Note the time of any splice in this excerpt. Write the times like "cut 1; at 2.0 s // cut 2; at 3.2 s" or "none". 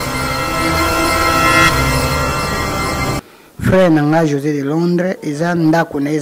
cut 1; at 3.2 s